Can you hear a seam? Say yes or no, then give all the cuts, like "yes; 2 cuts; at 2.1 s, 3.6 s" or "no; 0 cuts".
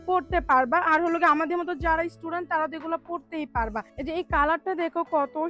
yes; 1 cut; at 3.9 s